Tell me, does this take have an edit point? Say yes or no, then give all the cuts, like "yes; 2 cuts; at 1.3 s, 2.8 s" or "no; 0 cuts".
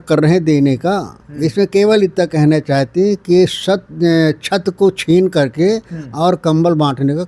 no; 0 cuts